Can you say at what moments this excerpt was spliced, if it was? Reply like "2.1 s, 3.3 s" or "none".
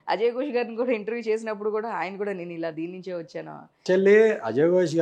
3.7 s